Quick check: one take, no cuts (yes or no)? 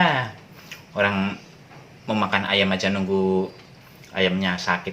yes